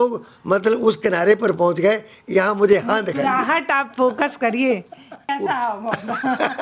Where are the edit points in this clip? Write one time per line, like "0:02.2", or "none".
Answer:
0:05.2